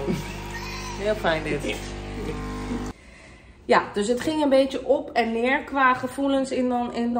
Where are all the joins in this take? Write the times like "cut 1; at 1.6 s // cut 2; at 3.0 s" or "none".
cut 1; at 2.9 s